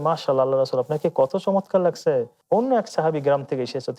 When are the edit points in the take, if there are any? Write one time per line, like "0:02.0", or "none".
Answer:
0:02.4